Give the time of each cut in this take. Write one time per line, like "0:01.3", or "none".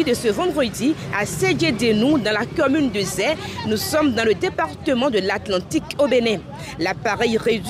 none